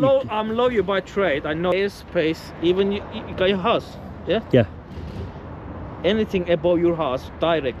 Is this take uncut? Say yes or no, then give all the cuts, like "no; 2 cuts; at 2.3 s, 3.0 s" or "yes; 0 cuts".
no; 1 cut; at 1.7 s